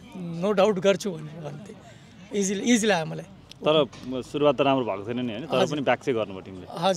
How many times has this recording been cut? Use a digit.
0